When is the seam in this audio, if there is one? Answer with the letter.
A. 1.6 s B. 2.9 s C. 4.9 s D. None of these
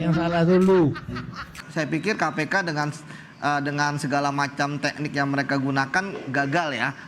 A